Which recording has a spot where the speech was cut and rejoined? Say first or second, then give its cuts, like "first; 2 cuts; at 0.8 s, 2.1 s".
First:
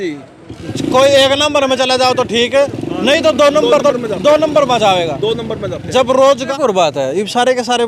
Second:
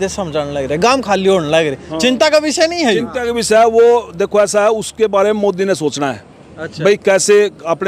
first; 1 cut; at 6.5 s